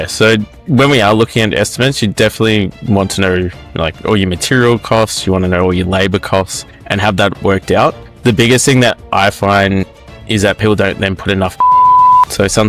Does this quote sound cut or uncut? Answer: uncut